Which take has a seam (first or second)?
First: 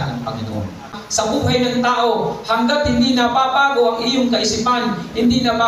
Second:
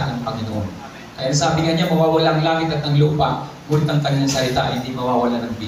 first